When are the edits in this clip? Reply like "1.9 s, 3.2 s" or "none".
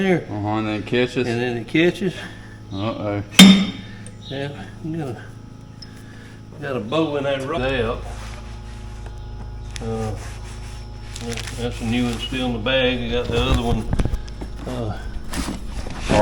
7.6 s